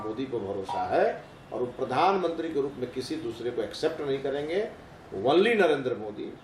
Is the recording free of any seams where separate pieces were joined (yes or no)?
yes